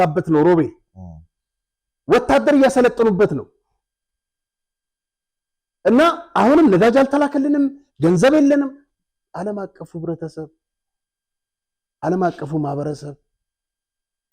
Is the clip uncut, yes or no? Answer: yes